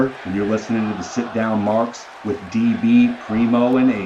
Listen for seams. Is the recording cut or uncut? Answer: uncut